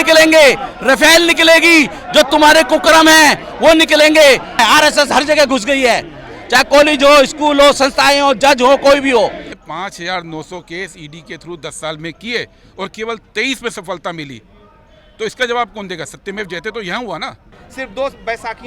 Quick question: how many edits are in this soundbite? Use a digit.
3